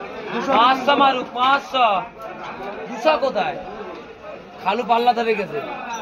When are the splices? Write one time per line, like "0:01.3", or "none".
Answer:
none